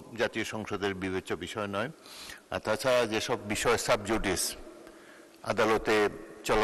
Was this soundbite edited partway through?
no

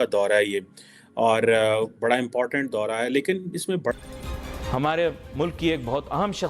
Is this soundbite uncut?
no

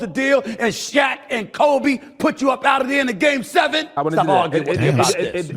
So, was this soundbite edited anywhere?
yes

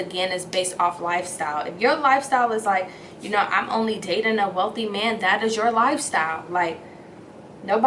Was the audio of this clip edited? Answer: no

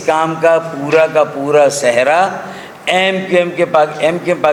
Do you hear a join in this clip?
no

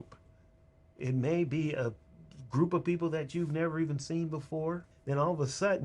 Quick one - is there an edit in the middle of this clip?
yes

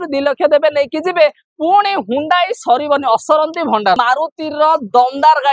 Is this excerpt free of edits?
no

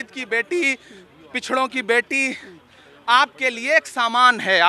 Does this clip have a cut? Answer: no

